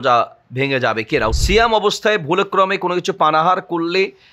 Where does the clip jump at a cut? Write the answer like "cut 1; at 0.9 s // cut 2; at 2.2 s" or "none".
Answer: cut 1; at 1.4 s